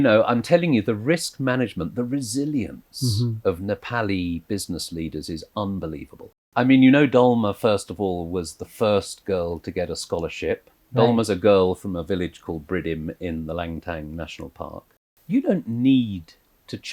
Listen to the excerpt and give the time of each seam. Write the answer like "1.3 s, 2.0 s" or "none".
6.5 s, 14.9 s